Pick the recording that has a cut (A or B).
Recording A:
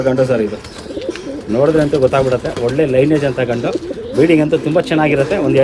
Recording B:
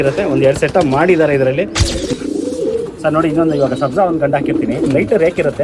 B